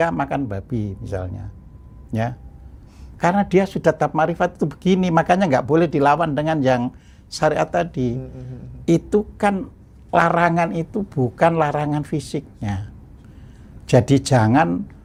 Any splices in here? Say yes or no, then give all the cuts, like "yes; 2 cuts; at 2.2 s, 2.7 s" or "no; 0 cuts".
no; 0 cuts